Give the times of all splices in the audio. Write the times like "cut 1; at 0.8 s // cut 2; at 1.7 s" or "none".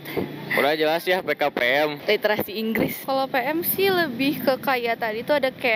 cut 1; at 3.0 s